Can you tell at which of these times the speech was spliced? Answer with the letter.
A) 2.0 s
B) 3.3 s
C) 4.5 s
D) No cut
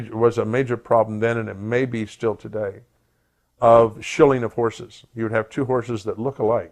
C